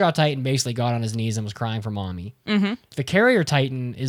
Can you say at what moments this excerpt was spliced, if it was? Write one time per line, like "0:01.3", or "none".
0:02.9